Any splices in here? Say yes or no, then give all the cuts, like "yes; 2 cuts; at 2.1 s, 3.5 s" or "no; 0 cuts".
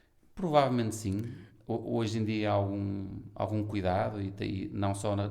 no; 0 cuts